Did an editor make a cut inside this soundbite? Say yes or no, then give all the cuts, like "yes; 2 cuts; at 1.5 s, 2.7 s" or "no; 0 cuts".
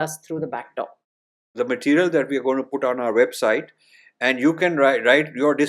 yes; 1 cut; at 1.5 s